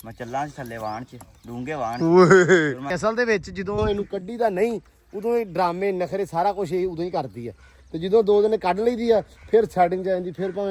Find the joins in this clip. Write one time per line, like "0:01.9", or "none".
0:02.9